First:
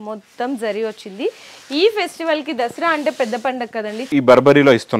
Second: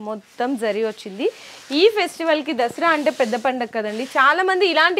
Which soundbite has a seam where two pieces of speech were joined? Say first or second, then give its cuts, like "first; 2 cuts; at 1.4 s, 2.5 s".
first; 1 cut; at 4.1 s